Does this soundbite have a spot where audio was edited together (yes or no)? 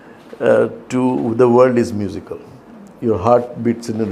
no